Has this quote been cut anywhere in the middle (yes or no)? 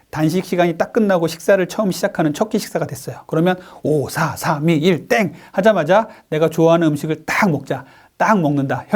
no